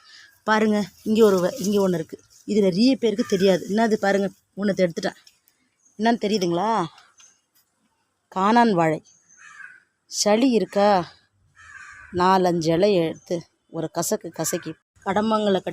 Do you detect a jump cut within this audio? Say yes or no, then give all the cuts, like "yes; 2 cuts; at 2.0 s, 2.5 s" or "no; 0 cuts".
yes; 1 cut; at 14.7 s